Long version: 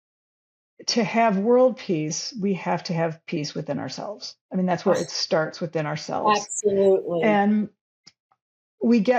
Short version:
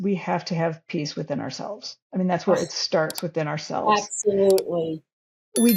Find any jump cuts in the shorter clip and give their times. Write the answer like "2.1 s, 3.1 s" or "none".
4.8 s